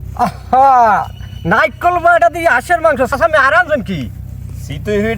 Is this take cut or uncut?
cut